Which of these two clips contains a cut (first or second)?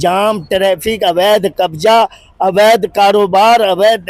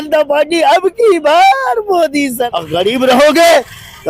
second